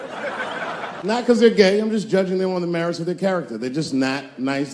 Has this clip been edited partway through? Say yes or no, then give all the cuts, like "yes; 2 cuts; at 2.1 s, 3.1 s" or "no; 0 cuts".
yes; 1 cut; at 1.1 s